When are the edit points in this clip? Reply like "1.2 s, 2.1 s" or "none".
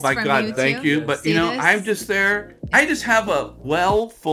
2.6 s, 3.6 s